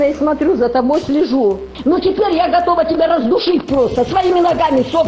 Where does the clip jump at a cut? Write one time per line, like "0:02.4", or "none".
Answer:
0:01.8